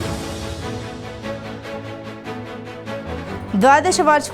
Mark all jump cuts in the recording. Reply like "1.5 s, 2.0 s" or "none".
none